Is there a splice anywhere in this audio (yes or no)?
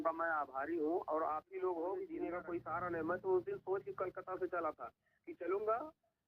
yes